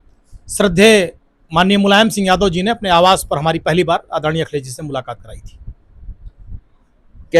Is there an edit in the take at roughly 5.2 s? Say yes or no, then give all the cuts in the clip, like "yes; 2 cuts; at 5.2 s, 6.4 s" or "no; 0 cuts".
no; 0 cuts